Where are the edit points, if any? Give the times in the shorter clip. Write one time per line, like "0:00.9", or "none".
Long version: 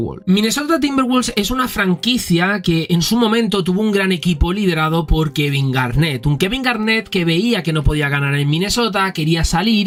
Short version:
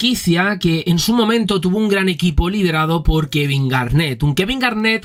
none